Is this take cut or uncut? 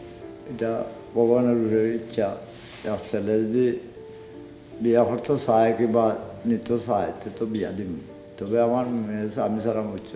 uncut